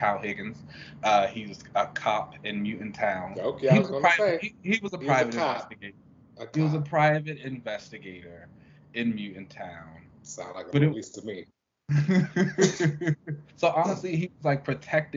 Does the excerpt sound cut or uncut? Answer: cut